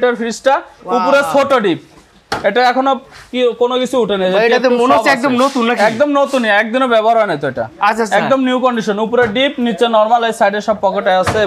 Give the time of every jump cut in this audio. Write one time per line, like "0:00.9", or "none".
none